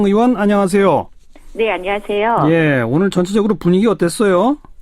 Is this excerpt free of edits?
yes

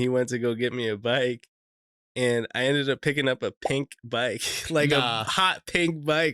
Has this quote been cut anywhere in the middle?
no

